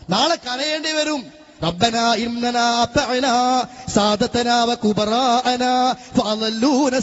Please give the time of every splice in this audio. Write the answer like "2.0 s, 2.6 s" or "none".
none

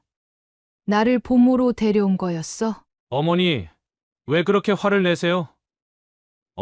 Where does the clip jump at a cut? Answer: 2.9 s

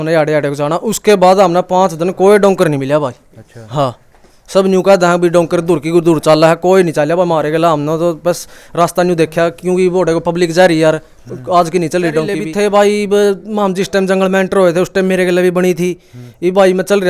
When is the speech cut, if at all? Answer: 12.5 s

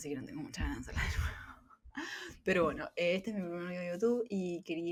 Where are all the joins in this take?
none

